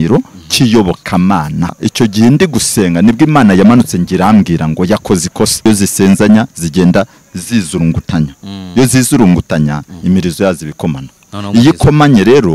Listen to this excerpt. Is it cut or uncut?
cut